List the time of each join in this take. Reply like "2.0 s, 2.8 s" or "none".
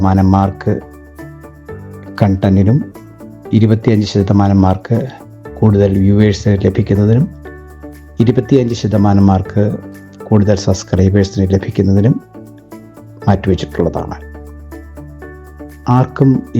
14.4 s, 15.8 s